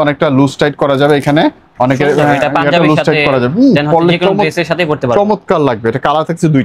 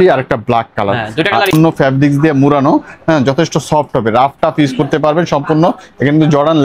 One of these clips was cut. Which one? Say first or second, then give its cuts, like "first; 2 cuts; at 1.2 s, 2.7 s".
second; 1 cut; at 1.5 s